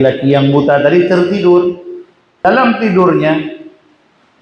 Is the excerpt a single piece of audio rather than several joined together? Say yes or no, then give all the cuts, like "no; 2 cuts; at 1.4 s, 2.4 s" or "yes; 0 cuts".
no; 1 cut; at 2.4 s